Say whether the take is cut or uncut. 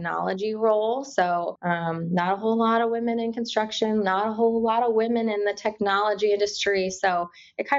cut